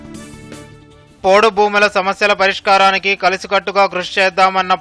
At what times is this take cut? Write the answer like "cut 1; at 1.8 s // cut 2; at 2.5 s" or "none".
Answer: none